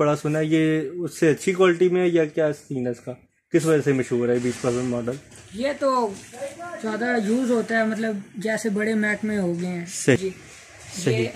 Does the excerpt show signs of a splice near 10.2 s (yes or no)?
yes